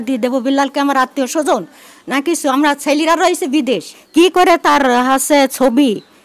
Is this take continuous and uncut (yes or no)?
no